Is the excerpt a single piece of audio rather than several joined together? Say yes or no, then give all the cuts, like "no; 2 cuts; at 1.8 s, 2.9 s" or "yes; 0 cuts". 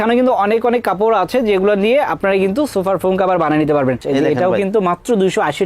no; 1 cut; at 4.0 s